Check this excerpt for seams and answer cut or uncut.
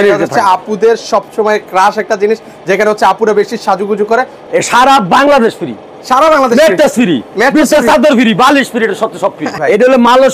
cut